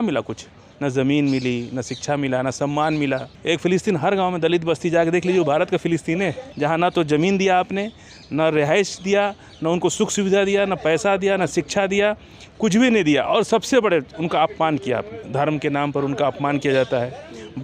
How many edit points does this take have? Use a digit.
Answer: 3